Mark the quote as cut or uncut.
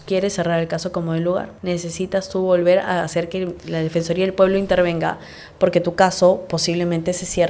cut